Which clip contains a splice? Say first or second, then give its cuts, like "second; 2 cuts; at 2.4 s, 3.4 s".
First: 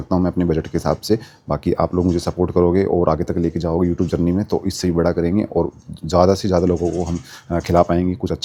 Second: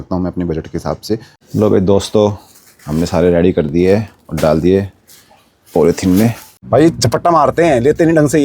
second; 2 cuts; at 1.3 s, 6.5 s